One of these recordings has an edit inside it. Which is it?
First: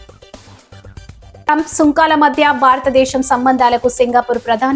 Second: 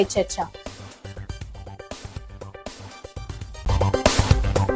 first; 1 cut; at 1.5 s

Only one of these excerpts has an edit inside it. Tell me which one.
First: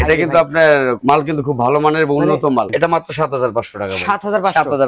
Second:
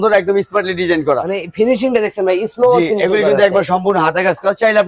first; 1 cut; at 2.7 s

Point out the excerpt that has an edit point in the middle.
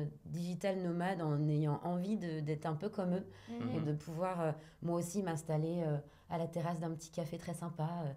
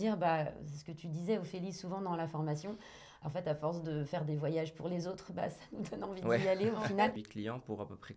second; 1 cut; at 7.2 s

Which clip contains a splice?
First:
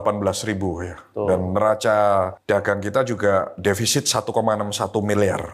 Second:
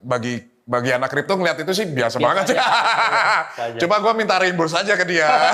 first; 1 cut; at 2.4 s

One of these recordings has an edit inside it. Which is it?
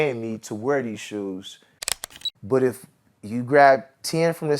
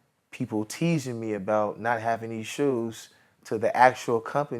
first; 1 cut; at 2.0 s

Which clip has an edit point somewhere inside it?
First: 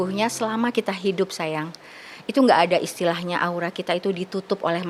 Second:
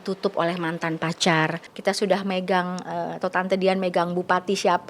second; 1 cut; at 1.7 s

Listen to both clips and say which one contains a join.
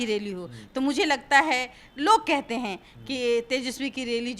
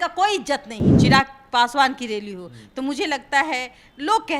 second; 1 cut; at 0.9 s

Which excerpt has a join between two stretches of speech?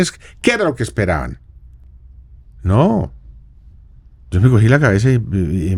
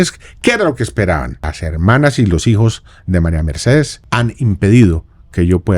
second; 2 cuts; at 1.6 s, 4.0 s

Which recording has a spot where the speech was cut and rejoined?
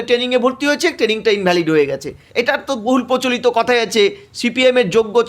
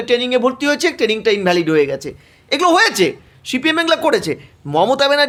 first; 1 cut; at 2.2 s

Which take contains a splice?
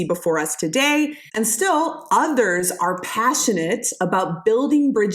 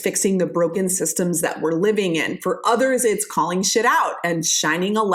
first; 1 cut; at 1.2 s

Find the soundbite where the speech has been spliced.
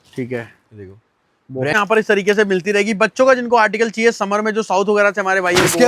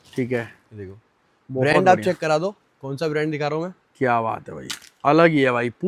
first; 1 cut; at 1.7 s

